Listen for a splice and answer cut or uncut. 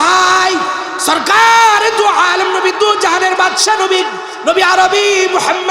cut